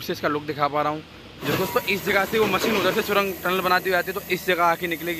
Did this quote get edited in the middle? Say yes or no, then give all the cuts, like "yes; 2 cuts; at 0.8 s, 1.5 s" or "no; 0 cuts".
yes; 1 cut; at 1.5 s